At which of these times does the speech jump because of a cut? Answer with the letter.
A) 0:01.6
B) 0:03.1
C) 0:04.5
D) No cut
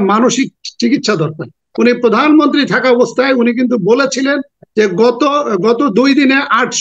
A